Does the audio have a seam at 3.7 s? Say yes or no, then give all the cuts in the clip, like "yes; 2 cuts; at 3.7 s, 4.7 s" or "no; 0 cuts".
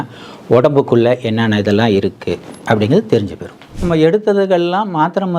yes; 1 cut; at 3.7 s